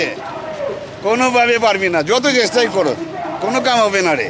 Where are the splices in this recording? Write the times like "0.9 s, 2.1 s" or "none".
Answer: none